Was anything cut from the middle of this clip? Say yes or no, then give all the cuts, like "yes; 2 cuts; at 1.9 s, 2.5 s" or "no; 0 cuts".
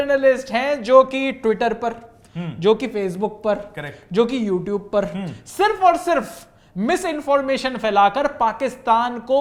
no; 0 cuts